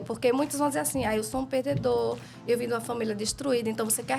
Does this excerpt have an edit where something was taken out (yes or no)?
no